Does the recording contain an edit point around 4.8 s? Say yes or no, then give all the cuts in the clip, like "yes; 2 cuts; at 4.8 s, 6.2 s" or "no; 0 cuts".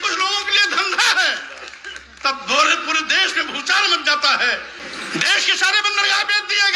yes; 1 cut; at 4.8 s